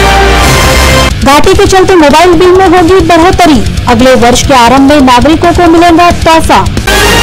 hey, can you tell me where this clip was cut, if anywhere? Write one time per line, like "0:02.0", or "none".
0:01.1